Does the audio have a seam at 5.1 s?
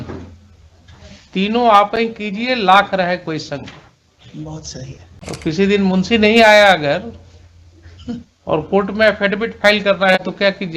yes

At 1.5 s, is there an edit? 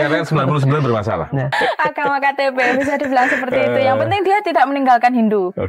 yes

